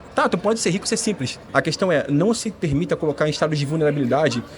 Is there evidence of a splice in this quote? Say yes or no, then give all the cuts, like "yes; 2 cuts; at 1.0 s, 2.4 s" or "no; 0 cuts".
yes; 1 cut; at 1.3 s